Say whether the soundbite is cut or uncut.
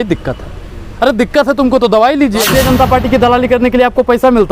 cut